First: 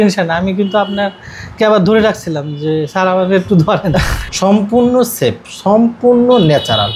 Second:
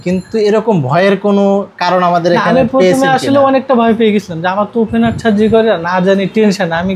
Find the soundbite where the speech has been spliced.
first; 1 cut; at 4.2 s

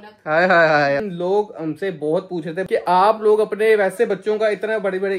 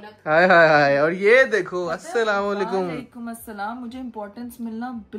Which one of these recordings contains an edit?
first; 2 cuts; at 1.0 s, 2.6 s

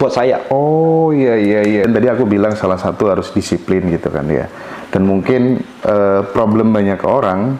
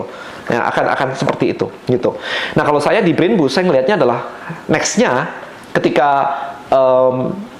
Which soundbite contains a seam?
first; 1 cut; at 1.8 s

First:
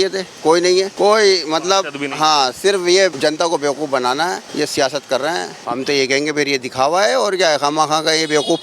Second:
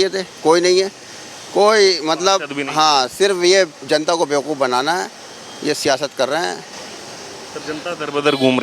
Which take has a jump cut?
first; 4 cuts; at 0.9 s, 3.2 s, 4.4 s, 5.6 s

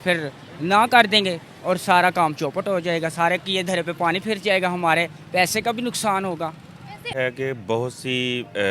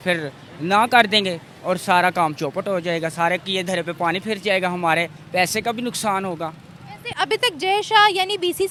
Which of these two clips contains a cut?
first; 1 cut; at 7.2 s

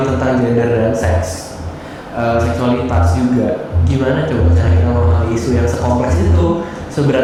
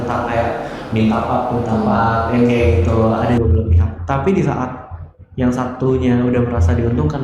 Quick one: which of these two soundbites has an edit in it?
second; 1 cut; at 3.4 s

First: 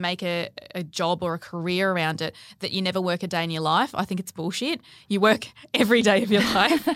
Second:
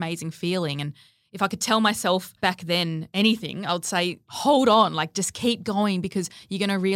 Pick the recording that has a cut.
second; 2 cuts; at 2.5 s, 4.3 s

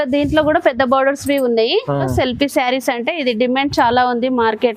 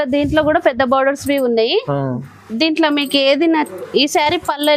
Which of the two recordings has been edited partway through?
first; 1 cut; at 2.1 s

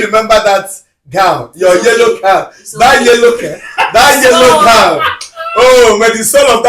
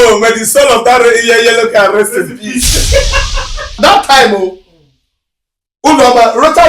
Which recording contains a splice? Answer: second; 1 cut; at 3.8 s

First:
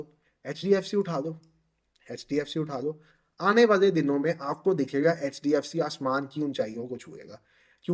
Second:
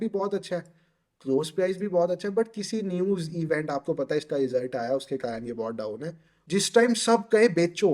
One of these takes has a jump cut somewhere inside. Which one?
second; 1 cut; at 6.3 s

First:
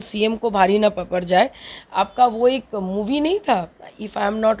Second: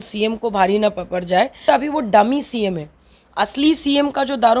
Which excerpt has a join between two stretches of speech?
second; 1 cut; at 1.6 s

